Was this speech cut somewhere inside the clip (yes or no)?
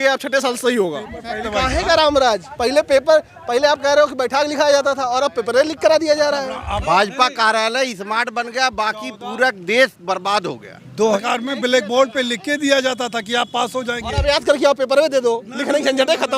yes